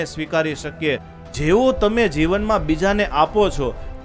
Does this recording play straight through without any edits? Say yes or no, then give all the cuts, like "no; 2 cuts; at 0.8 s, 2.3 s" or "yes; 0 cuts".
no; 1 cut; at 1.1 s